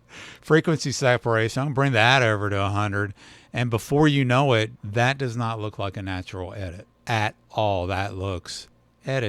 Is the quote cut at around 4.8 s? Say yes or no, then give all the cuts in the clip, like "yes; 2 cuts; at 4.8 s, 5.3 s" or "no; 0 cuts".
yes; 2 cuts; at 4.8 s, 6.9 s